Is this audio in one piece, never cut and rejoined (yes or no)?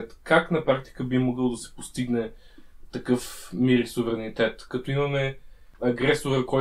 no